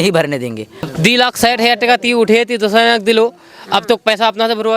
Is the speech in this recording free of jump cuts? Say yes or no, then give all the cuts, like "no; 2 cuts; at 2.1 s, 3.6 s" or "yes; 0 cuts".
no; 1 cut; at 0.9 s